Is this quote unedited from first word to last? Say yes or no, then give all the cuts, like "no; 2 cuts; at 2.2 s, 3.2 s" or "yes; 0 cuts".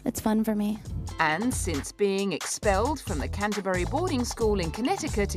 no; 1 cut; at 3.1 s